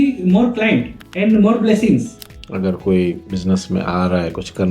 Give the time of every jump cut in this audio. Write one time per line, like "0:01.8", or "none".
0:01.0
0:02.2
0:03.3